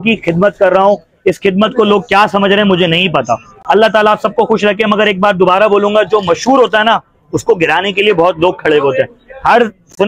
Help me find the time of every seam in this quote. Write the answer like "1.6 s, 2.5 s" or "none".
none